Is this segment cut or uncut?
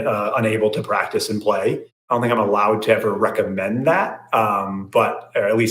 cut